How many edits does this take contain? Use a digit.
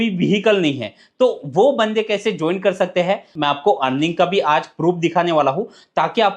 1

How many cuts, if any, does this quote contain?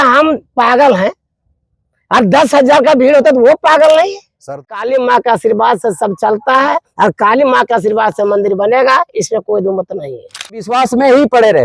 2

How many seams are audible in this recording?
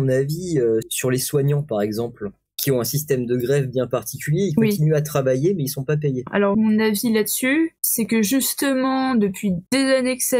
4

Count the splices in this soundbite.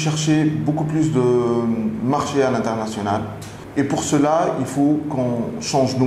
1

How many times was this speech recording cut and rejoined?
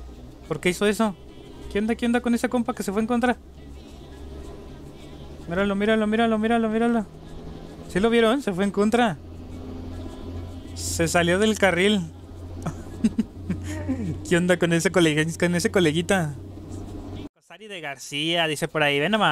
1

